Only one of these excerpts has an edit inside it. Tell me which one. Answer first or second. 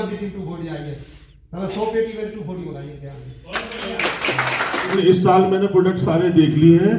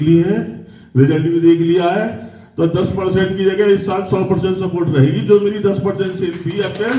first